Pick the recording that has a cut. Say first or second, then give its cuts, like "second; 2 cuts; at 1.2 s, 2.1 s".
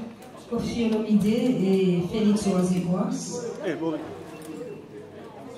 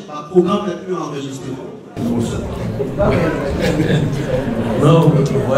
second; 1 cut; at 2.0 s